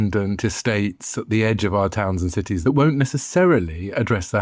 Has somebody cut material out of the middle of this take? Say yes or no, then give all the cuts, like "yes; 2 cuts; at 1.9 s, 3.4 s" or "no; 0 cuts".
yes; 1 cut; at 2.5 s